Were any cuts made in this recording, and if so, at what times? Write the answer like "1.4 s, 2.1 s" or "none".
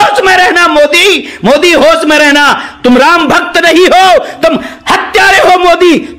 none